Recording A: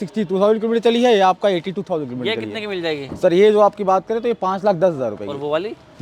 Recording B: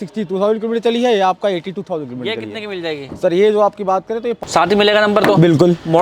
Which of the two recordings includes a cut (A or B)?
B